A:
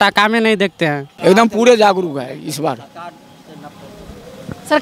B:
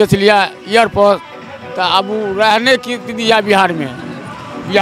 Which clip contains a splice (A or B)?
A